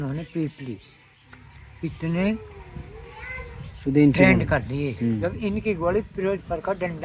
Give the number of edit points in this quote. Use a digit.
1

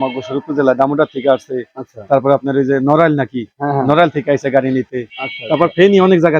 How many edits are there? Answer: 0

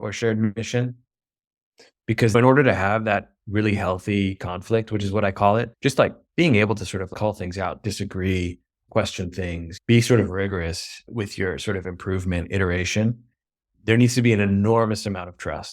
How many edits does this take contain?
1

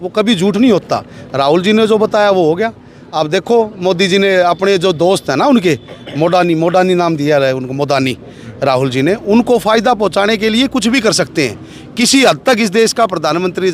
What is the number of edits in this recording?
0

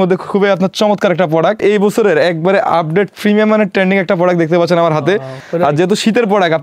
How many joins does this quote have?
2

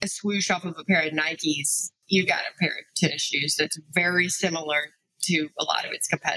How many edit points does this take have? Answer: 1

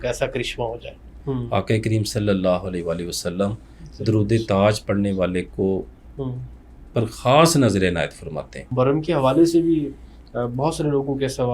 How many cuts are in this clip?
2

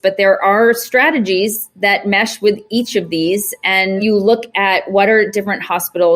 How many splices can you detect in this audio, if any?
1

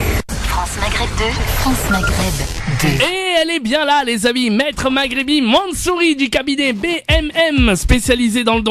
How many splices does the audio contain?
0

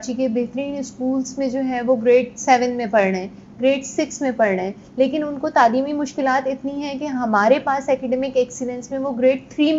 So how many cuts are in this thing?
0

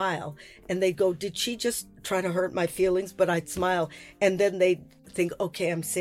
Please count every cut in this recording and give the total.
3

